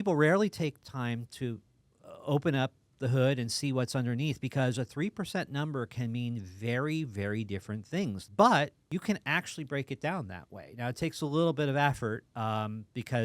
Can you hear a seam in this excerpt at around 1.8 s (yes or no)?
no